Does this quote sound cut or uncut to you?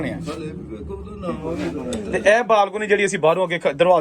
cut